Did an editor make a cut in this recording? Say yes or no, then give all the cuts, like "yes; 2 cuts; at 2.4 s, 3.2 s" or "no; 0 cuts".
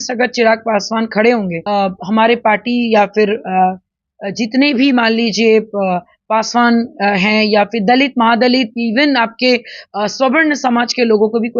yes; 1 cut; at 1.6 s